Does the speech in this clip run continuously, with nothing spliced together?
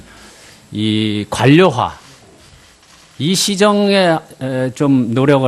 no; 1 cut; at 3.2 s

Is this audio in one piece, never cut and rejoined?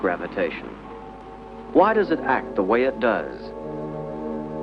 yes; 0 cuts

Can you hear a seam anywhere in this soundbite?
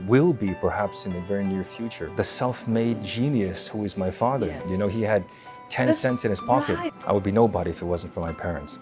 yes; 2 cuts; at 2.1 s, 6.9 s

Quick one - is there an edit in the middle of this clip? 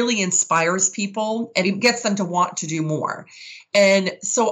yes; 1 cut; at 1.6 s

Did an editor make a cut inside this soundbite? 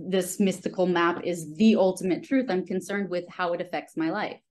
no; 0 cuts

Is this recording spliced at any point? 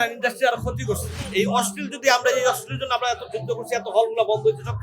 yes; 1 cut; at 1.1 s

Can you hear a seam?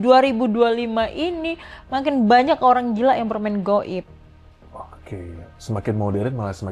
no; 0 cuts

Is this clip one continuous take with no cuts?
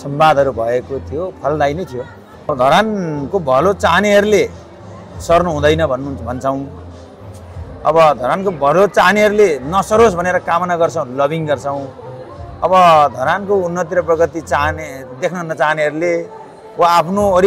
no; 1 cut; at 2.5 s

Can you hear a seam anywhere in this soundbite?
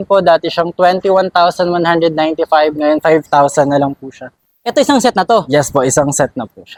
no; 0 cuts

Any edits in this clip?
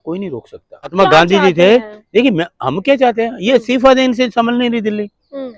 yes; 1 cut; at 0.9 s

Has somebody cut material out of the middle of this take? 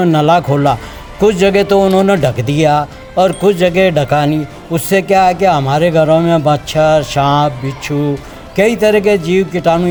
no; 0 cuts

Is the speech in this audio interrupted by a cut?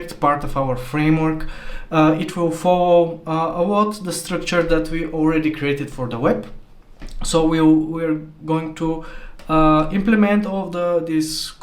no; 0 cuts

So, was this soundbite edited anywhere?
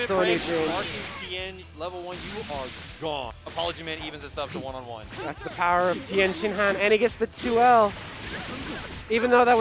yes; 1 cut; at 3.4 s

